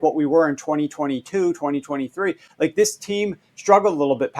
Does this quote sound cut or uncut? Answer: uncut